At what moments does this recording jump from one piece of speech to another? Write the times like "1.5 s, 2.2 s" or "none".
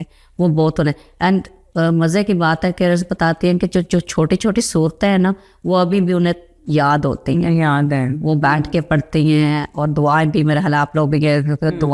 none